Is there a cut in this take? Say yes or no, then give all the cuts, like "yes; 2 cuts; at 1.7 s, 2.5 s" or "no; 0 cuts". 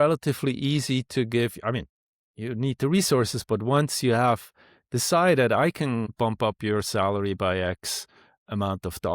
yes; 1 cut; at 6.1 s